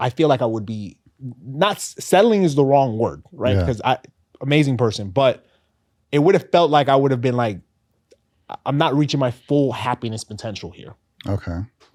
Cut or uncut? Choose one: uncut